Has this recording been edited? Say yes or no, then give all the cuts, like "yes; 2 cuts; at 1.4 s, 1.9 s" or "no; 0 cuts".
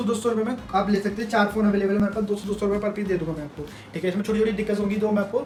no; 0 cuts